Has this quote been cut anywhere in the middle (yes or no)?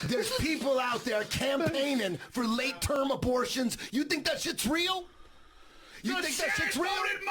no